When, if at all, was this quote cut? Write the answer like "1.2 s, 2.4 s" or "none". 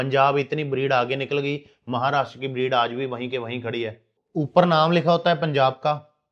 4.2 s